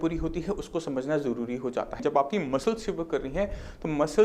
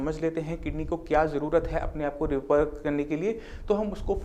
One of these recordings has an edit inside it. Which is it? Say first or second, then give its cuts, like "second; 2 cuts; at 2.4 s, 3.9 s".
first; 1 cut; at 2.0 s